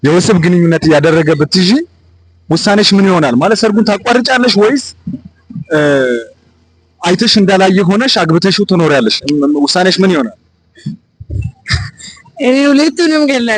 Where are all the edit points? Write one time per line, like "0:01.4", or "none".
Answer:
none

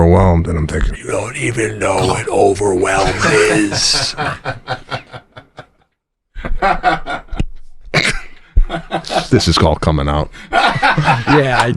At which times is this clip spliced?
0:00.9

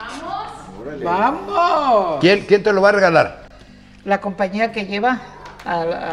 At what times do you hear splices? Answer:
none

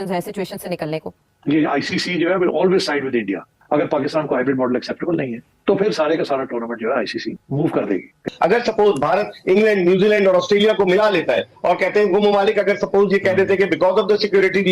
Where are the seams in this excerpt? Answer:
0:01.2
0:03.6
0:08.3

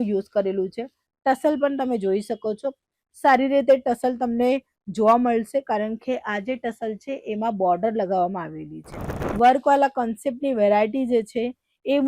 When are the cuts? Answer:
0:09.1

